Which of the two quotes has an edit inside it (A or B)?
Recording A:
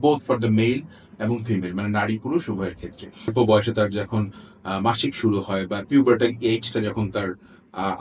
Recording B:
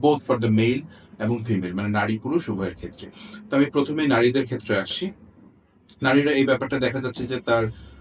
A